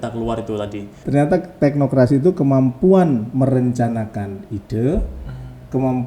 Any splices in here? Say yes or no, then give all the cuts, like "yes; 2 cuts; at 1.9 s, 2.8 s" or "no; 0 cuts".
yes; 1 cut; at 0.9 s